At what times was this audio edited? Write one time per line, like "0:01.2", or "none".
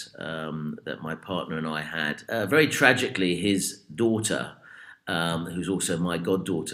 0:02.2